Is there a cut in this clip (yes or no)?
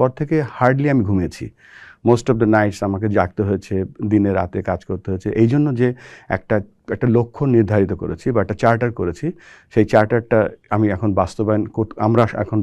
no